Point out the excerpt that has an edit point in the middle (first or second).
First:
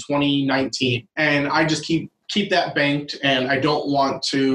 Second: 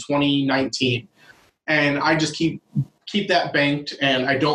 first